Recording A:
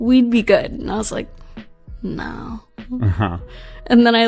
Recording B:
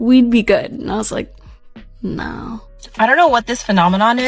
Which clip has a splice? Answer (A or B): B